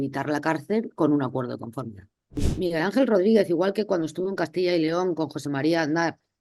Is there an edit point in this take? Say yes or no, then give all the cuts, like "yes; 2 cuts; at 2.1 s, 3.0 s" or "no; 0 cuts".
yes; 1 cut; at 2.5 s